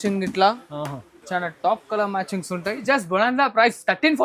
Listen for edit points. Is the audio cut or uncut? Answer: cut